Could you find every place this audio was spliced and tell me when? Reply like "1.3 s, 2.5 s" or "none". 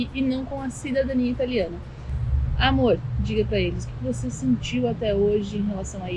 none